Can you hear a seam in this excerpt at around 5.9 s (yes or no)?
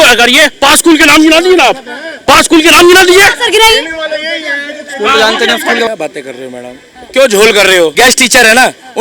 yes